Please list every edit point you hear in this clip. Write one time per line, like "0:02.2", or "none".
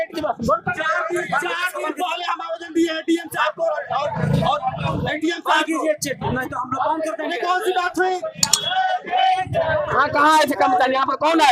0:08.5